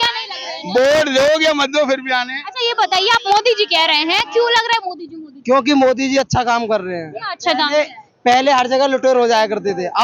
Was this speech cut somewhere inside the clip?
no; 0 cuts

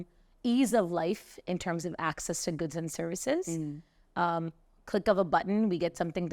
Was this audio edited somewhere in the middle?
no; 0 cuts

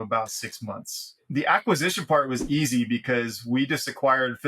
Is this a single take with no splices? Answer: no; 1 cut; at 1.2 s

